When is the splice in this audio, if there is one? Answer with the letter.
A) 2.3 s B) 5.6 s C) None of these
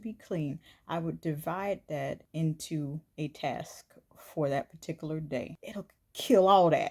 B